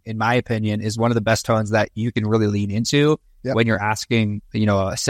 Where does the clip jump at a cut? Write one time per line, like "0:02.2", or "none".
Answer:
none